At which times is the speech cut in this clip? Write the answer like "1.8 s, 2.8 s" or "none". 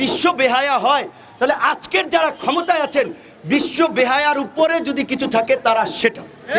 none